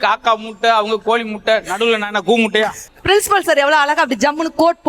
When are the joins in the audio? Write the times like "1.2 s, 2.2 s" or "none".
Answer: 2.9 s